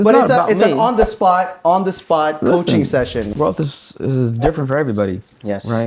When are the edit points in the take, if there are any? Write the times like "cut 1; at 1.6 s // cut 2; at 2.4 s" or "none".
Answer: cut 1; at 3.3 s